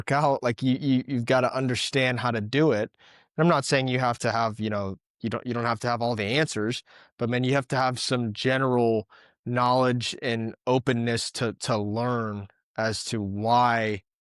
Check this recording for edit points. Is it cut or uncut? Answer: uncut